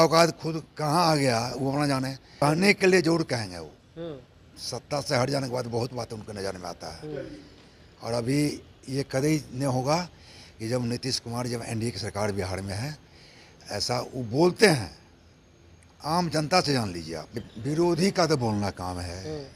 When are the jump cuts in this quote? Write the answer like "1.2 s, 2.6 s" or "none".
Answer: 2.4 s, 17.4 s